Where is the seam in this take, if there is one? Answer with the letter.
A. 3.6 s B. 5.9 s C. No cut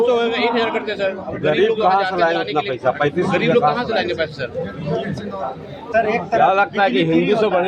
B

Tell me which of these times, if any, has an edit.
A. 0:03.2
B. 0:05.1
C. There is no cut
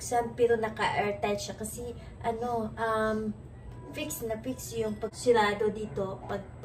B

